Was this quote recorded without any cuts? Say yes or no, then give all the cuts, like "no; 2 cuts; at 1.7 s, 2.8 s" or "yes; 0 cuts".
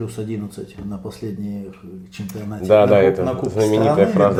yes; 0 cuts